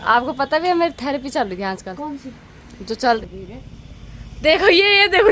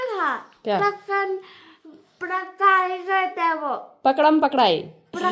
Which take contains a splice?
first; 1 cut; at 3.2 s

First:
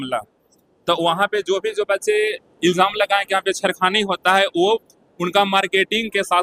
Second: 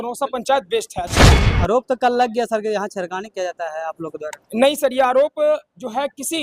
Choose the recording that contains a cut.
second; 1 cut; at 1.4 s

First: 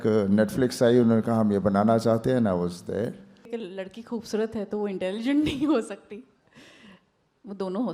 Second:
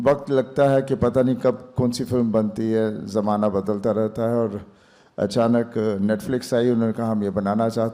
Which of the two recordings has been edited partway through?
first; 1 cut; at 3.5 s

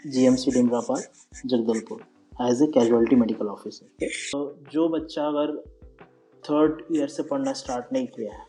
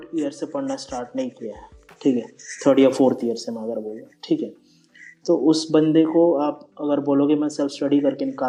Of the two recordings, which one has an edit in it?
first; 1 cut; at 4.3 s

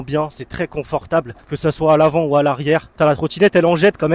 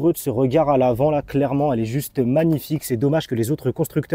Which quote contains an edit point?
first; 2 cuts; at 1.4 s, 2.9 s

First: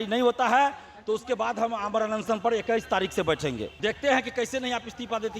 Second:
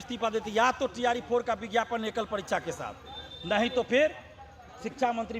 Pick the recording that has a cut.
first; 1 cut; at 3.8 s

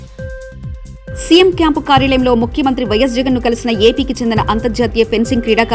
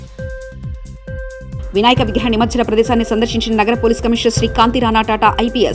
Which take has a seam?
first; 1 cut; at 1.0 s

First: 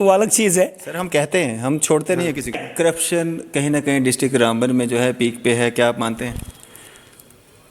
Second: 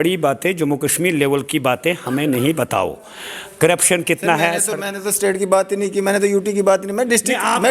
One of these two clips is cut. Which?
first; 1 cut; at 2.6 s

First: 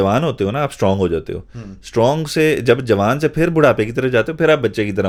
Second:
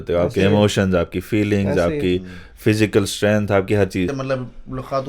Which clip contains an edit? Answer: second; 1 cut; at 4.2 s

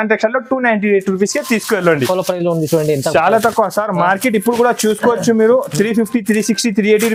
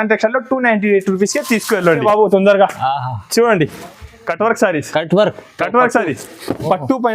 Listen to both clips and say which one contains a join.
second; 1 cut; at 2.0 s

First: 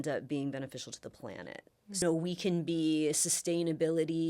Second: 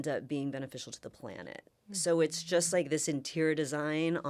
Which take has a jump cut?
first; 1 cut; at 2.0 s

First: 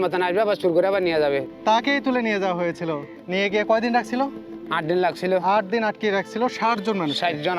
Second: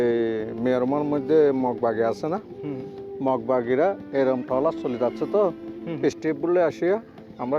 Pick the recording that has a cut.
first; 2 cuts; at 1.5 s, 3.1 s

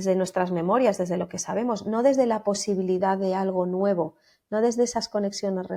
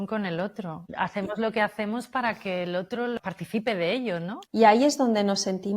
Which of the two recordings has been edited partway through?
second; 3 cuts; at 1.1 s, 3.2 s, 4.4 s

